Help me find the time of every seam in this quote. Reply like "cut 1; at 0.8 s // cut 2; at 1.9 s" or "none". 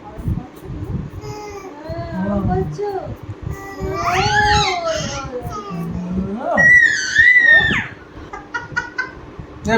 cut 1; at 8.2 s